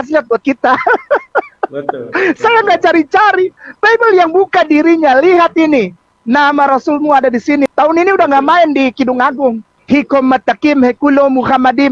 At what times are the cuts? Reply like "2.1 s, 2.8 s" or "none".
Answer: 7.7 s, 9.8 s